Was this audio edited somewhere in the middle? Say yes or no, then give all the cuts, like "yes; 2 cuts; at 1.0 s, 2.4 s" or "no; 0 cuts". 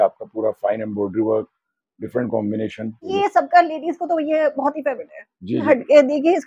yes; 2 cuts; at 3.1 s, 5.7 s